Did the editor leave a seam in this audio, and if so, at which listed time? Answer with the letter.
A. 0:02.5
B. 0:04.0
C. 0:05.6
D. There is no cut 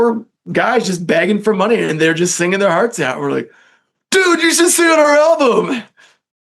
D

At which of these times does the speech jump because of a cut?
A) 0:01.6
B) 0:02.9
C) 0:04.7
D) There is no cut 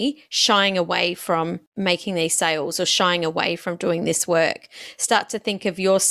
A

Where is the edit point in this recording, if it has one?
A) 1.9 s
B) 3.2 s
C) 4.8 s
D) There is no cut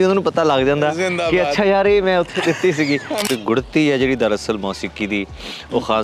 B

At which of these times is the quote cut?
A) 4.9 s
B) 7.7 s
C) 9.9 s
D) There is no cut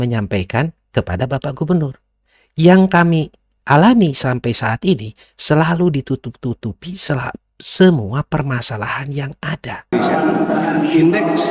C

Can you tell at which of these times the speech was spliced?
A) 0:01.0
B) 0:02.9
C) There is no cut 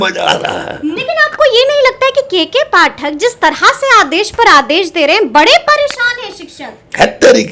A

